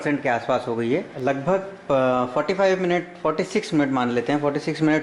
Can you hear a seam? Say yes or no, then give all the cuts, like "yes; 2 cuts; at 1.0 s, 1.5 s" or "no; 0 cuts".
yes; 1 cut; at 1.1 s